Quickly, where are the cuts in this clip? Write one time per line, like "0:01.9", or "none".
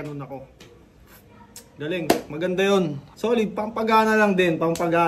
0:03.0